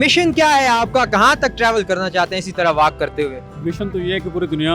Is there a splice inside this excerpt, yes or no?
yes